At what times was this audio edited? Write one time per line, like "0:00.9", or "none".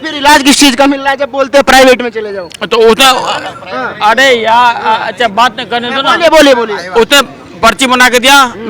none